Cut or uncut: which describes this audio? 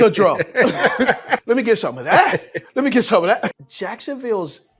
cut